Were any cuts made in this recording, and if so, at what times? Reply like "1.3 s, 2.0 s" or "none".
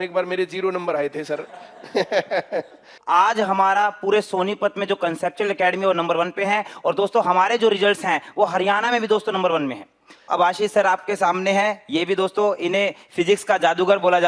2.9 s, 10.3 s